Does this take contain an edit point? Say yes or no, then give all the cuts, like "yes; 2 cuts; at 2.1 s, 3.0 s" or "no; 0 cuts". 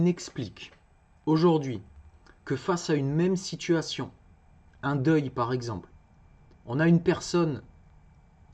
no; 0 cuts